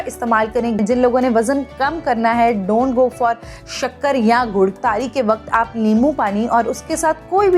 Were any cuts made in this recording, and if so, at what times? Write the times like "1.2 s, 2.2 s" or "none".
0.8 s, 4.8 s